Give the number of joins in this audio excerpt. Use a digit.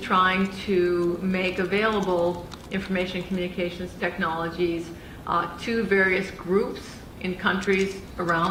0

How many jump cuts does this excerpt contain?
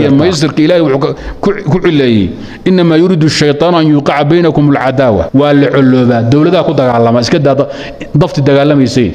1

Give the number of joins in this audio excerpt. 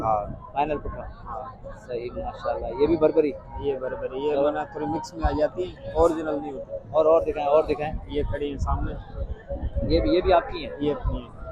0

